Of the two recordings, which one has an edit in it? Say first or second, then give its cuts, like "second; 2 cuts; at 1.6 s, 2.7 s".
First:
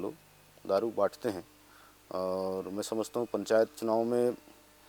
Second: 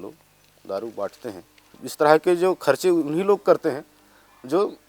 second; 1 cut; at 1.8 s